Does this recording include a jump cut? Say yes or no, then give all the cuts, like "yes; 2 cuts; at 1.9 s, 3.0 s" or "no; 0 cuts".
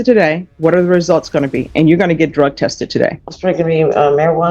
yes; 1 cut; at 3.3 s